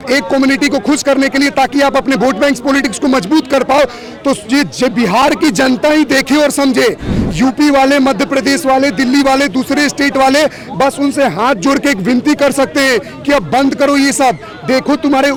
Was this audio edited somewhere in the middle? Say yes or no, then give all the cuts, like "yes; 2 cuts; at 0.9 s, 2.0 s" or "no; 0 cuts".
no; 0 cuts